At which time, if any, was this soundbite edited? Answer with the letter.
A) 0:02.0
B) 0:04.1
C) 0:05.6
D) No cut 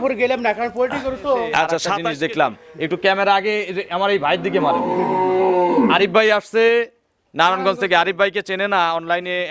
A